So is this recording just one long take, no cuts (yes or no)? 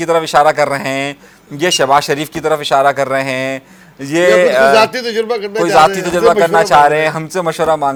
yes